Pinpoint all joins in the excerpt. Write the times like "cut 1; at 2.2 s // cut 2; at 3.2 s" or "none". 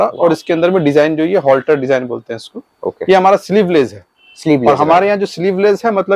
none